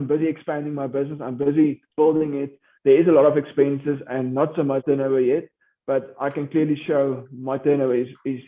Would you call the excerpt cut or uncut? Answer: uncut